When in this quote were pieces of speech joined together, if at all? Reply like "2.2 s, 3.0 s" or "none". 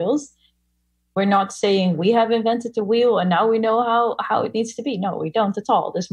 0.9 s